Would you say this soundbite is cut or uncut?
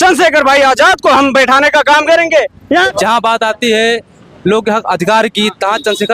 cut